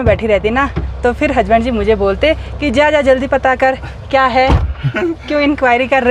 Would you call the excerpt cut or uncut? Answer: uncut